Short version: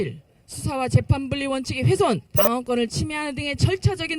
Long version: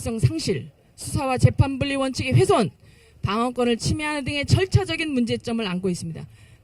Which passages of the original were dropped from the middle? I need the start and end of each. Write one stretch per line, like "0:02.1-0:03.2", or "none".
0:02.8-0:03.2